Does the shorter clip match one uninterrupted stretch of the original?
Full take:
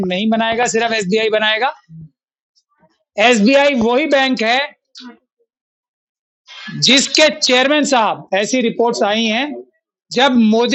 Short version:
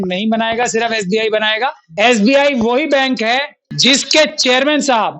no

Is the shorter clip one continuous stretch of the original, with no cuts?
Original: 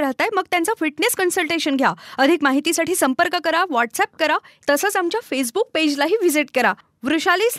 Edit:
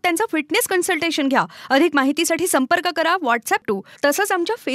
no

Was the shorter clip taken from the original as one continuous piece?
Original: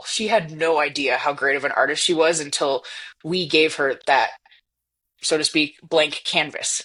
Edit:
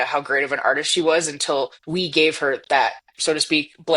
no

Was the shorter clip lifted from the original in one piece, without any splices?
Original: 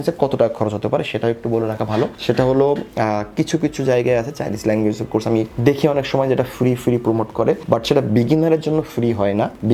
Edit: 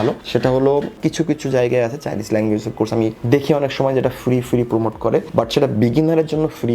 no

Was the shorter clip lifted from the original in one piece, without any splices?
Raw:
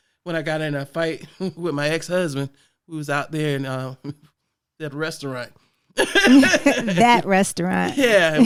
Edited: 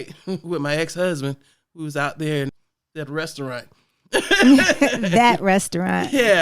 no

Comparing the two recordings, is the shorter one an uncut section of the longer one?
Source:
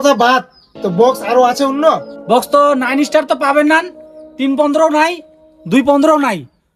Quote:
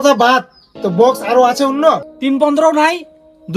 no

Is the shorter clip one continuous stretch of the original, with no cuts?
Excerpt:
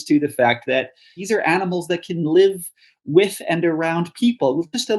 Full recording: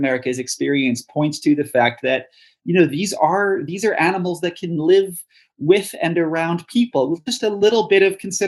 no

